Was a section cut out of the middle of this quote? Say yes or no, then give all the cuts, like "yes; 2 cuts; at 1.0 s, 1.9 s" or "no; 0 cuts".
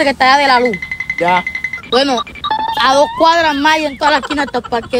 no; 0 cuts